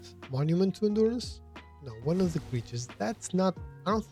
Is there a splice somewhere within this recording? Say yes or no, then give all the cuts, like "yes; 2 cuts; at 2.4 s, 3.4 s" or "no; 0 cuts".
no; 0 cuts